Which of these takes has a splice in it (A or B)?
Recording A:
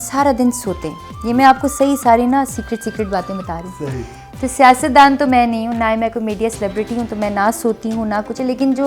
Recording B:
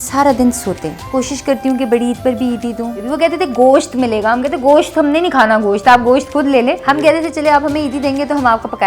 B